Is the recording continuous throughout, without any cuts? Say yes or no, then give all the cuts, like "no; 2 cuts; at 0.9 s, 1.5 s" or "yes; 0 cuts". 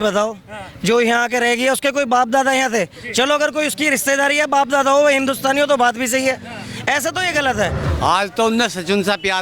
no; 1 cut; at 7.8 s